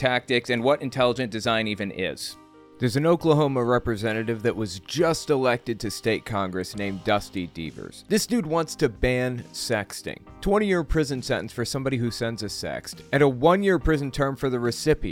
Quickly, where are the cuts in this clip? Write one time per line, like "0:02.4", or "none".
0:02.5